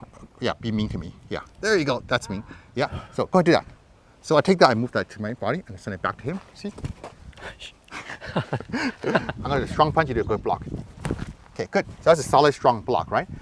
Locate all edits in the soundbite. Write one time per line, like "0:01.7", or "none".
0:09.3